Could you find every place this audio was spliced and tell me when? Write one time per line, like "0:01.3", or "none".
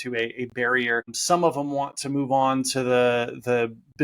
0:01.1